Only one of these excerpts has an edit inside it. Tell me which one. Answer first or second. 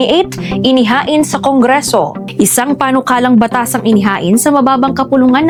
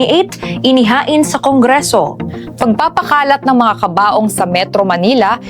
second